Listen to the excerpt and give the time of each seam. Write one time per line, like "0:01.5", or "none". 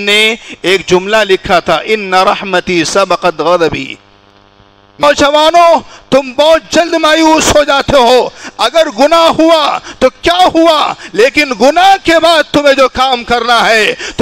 0:05.0